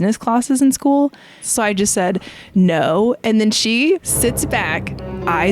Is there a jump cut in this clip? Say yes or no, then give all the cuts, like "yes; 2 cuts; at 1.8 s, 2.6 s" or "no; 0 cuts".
yes; 2 cuts; at 1.5 s, 4.1 s